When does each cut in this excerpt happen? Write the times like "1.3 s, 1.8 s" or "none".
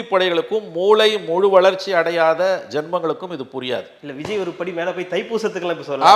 none